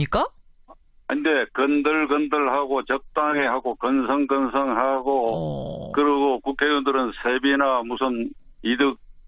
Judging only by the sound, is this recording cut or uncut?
cut